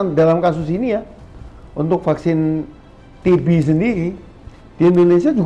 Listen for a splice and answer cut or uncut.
uncut